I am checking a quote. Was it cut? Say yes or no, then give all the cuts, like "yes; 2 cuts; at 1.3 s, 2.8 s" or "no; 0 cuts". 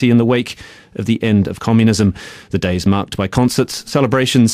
no; 0 cuts